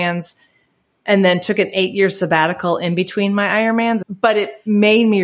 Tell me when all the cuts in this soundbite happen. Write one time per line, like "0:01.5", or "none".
0:04.0